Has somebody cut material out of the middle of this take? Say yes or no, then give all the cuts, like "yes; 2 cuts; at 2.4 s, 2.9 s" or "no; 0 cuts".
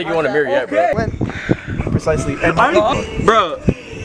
no; 0 cuts